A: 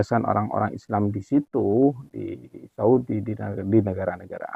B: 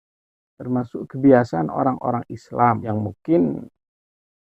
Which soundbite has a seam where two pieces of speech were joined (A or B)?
B